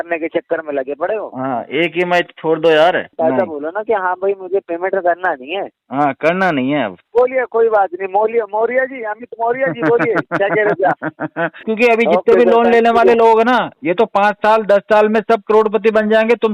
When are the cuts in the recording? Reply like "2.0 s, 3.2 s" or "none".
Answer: 3.1 s, 7.0 s, 11.7 s